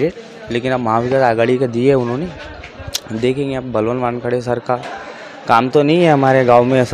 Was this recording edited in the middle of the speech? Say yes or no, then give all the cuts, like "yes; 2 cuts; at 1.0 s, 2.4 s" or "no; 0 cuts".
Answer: no; 0 cuts